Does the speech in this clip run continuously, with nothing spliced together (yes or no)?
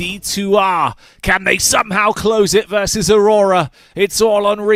yes